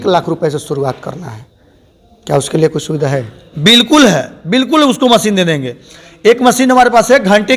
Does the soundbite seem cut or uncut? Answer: uncut